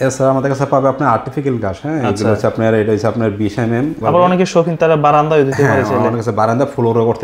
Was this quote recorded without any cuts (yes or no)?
no